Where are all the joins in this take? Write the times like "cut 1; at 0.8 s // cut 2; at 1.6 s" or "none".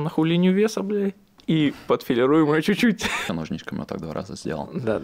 cut 1; at 3.2 s